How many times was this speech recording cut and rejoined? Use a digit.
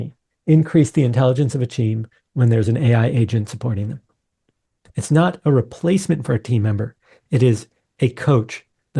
0